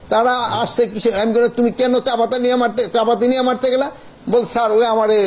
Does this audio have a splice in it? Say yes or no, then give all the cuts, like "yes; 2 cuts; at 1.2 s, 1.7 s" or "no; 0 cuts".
no; 0 cuts